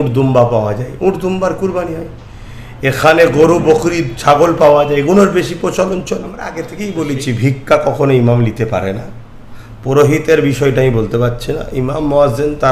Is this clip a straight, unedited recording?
no; 1 cut; at 6.7 s

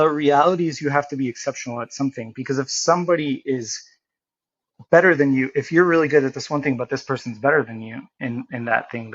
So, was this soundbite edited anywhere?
no; 0 cuts

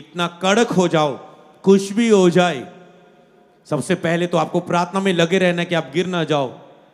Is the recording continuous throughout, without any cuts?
yes; 0 cuts

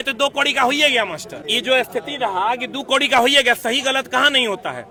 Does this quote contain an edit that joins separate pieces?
no; 0 cuts

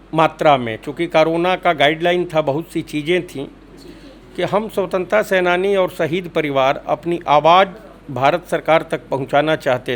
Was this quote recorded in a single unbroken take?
yes; 0 cuts

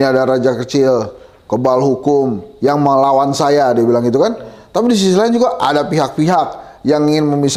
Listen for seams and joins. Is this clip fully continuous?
yes; 0 cuts

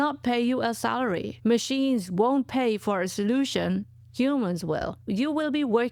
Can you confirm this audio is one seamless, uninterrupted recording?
yes; 0 cuts

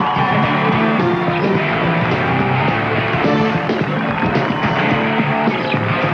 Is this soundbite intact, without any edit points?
no; 1 cut; at 1.6 s

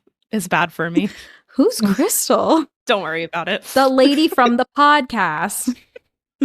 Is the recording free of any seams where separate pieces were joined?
no; 1 cut; at 2.8 s

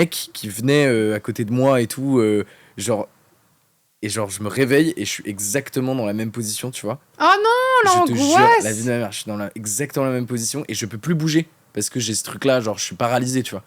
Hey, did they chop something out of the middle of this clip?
no; 0 cuts

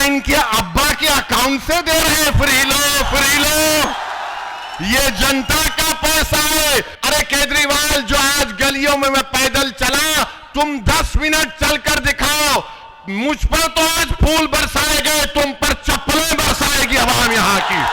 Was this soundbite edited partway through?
yes; 1 cut; at 6.9 s

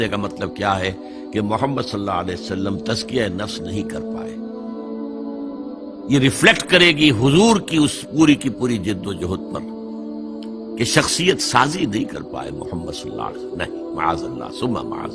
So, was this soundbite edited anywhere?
no; 0 cuts

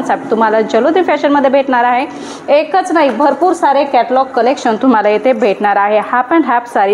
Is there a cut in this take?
no; 0 cuts

